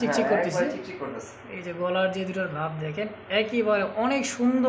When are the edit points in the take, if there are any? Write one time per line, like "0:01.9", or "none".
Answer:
none